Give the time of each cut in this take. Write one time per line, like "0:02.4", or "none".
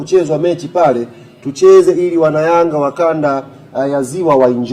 none